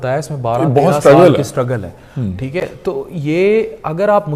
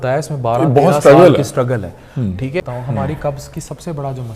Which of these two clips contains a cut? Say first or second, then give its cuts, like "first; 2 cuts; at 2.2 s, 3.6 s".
second; 1 cut; at 2.6 s